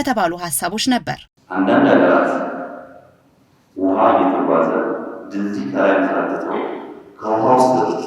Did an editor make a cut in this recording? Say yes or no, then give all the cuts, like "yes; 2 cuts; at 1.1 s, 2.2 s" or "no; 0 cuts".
yes; 1 cut; at 1.4 s